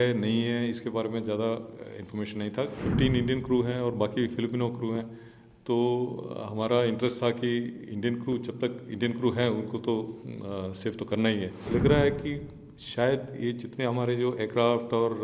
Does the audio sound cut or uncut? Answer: cut